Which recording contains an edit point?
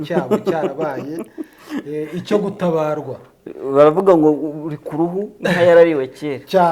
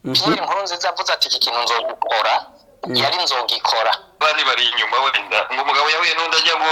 second; 1 cut; at 4.2 s

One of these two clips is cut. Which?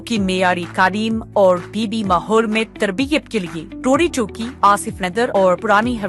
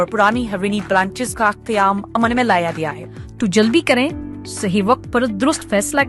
second; 1 cut; at 3.0 s

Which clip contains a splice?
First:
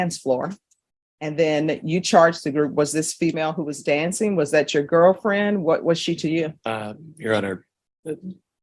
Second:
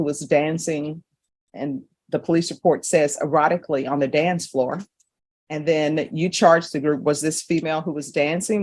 first; 1 cut; at 6.6 s

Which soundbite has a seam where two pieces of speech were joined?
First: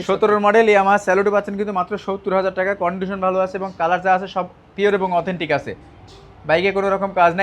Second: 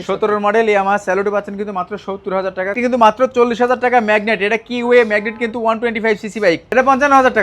second; 2 cuts; at 2.8 s, 6.7 s

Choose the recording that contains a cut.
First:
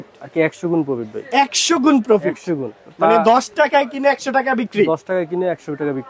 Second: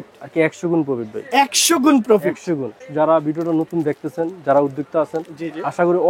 second; 1 cut; at 2.8 s

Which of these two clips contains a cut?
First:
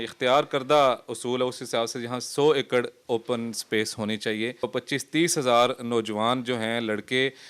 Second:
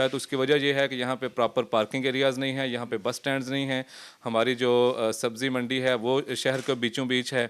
first; 1 cut; at 4.7 s

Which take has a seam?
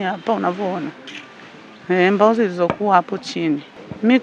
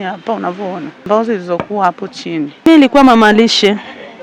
second; 2 cuts; at 1.1 s, 2.5 s

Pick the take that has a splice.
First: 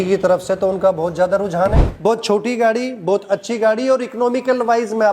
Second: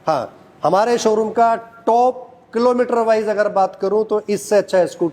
first; 1 cut; at 1.9 s

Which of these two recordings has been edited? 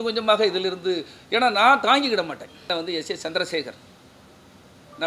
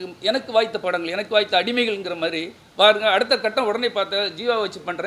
first; 1 cut; at 2.7 s

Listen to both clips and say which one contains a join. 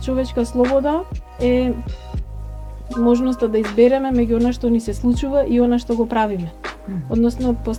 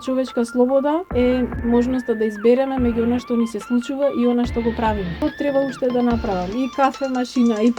second; 2 cuts; at 1.2 s, 5.2 s

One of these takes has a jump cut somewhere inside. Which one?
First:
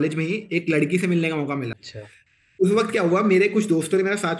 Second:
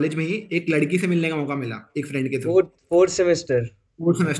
first; 1 cut; at 1.8 s

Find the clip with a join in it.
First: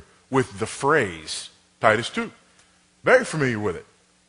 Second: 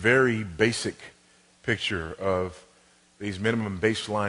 second; 1 cut; at 2.1 s

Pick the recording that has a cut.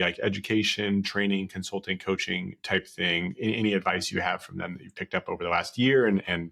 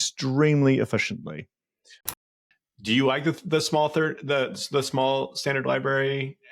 second; 1 cut; at 2.2 s

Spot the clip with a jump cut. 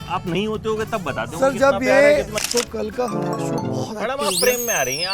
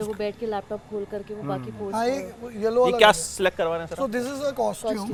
first; 1 cut; at 2.3 s

